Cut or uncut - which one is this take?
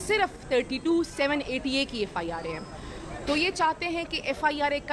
uncut